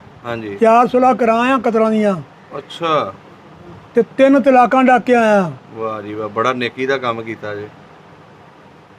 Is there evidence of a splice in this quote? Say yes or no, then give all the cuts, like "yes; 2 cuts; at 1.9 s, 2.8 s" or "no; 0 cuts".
no; 0 cuts